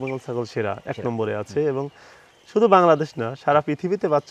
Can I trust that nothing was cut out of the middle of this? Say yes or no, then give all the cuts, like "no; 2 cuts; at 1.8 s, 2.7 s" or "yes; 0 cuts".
yes; 0 cuts